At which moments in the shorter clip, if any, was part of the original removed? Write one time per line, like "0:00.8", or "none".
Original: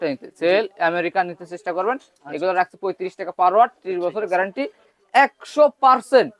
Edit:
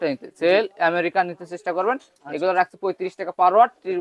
none